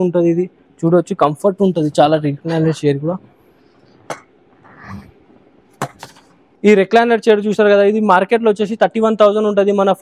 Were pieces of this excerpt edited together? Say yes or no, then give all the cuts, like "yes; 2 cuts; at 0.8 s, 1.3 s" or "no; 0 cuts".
no; 0 cuts